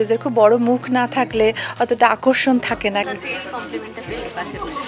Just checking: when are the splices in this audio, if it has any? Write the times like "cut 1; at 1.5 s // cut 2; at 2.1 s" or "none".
cut 1; at 3.0 s